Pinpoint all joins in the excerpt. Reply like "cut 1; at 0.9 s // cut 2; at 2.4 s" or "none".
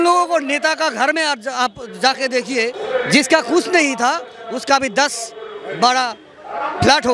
cut 1; at 2.8 s